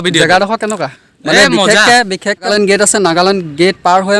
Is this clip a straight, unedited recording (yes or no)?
no